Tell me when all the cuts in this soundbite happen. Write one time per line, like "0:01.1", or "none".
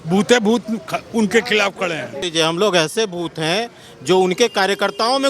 0:02.2